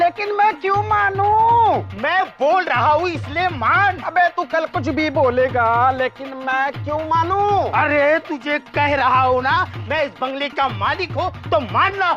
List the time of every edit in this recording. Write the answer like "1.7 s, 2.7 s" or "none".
none